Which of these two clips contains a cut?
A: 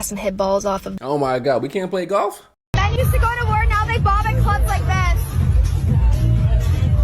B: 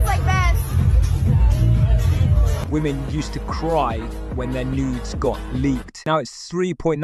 A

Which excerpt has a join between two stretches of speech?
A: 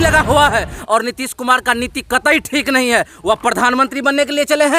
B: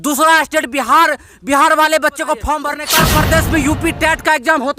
B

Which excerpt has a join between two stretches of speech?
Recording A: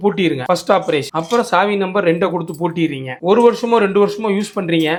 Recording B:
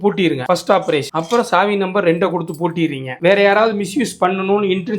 B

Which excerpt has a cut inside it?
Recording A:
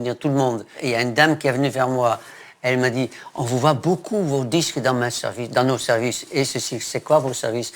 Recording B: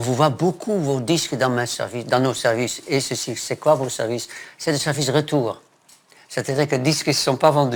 A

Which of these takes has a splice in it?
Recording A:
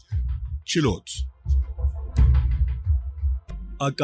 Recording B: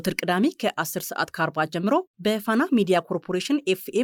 A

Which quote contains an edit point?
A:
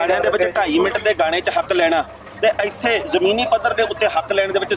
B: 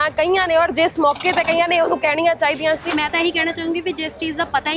B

